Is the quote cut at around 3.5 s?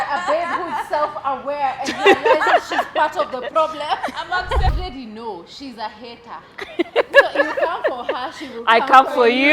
no; 1 cut; at 4.7 s

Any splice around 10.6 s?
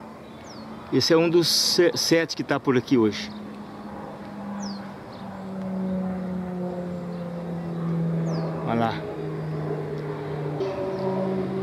yes; 1 cut; at 10.6 s

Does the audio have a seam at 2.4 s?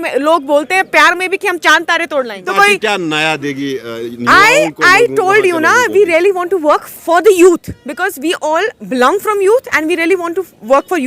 yes; 1 cut; at 2.4 s

